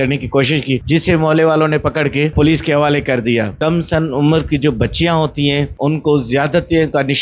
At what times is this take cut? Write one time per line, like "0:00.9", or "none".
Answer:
0:00.8
0:02.3
0:03.5
0:05.7